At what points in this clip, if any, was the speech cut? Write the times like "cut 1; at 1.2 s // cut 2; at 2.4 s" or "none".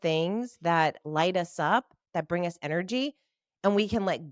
cut 1; at 2.0 s